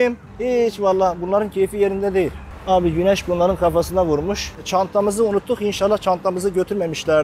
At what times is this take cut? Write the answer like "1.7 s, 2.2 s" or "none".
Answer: 2.5 s, 4.5 s